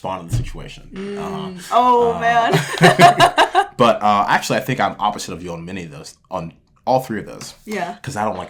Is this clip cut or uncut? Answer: uncut